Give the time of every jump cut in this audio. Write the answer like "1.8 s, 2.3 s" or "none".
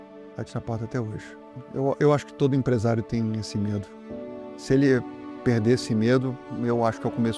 1.5 s

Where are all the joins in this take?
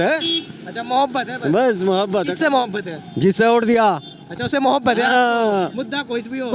none

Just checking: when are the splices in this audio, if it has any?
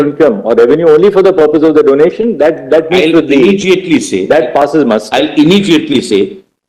none

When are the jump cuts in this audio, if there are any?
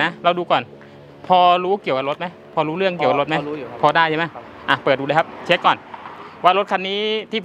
none

